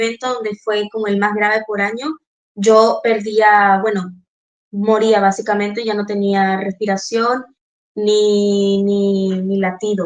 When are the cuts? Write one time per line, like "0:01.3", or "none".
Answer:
none